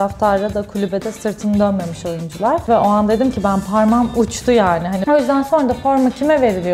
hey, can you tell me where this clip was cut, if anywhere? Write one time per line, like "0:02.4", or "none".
0:02.7
0:05.0